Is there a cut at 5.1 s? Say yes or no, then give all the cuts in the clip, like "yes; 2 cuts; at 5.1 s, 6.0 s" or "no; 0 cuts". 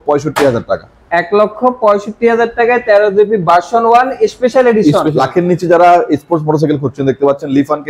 yes; 1 cut; at 5.1 s